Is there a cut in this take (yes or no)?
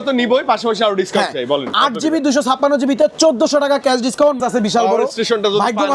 yes